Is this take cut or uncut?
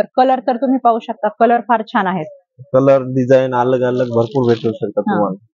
uncut